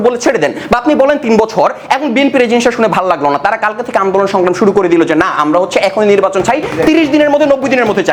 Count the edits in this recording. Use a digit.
0